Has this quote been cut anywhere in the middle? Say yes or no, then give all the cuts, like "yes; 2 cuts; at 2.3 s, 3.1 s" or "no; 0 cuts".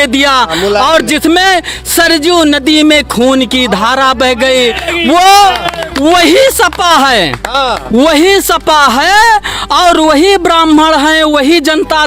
no; 0 cuts